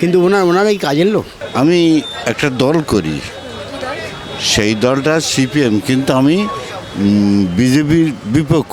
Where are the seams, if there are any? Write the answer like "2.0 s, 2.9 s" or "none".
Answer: 1.4 s